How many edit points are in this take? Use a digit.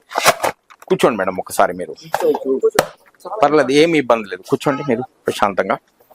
0